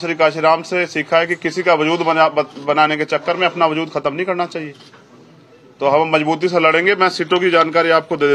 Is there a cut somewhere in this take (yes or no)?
no